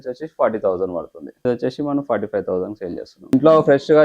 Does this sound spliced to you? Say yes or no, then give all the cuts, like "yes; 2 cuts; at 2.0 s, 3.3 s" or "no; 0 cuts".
yes; 2 cuts; at 1.4 s, 3.3 s